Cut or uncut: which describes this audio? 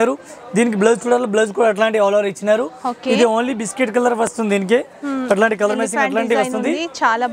uncut